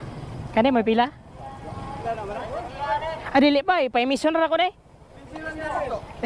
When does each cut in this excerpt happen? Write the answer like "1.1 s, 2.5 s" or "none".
2.0 s